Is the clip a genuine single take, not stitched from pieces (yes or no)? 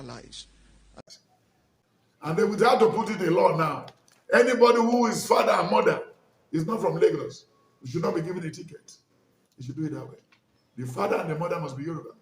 no